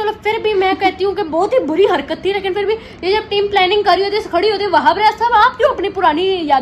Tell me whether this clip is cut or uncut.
uncut